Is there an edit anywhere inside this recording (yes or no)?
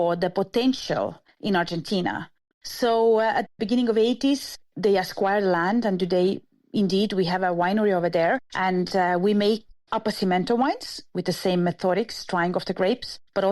yes